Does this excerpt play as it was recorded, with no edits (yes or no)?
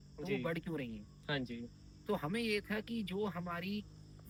yes